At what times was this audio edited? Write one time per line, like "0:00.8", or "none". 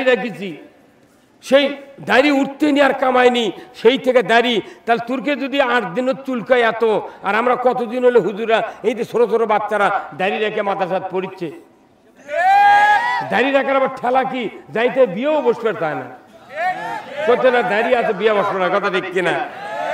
none